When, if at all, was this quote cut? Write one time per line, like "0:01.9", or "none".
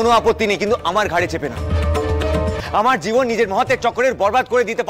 0:02.6